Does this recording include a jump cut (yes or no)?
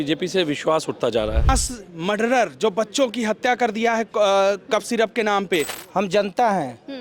yes